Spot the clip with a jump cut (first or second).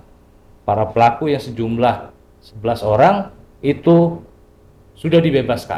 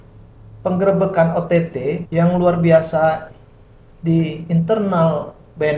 second